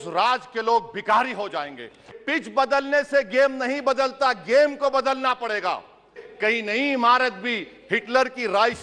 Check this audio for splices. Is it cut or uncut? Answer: cut